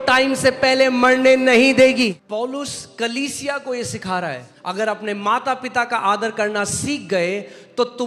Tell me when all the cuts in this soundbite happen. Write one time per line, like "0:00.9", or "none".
0:02.2
0:04.5